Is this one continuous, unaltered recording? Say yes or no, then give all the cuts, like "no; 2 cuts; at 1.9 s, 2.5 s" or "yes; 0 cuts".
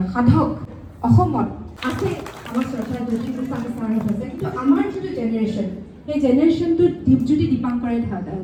yes; 0 cuts